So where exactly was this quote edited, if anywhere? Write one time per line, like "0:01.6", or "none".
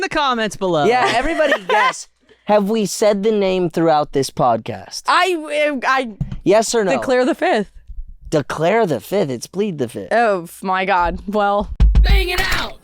0:11.9